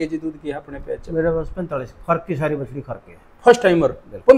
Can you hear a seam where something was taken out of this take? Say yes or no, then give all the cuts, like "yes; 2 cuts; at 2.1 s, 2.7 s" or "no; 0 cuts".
no; 0 cuts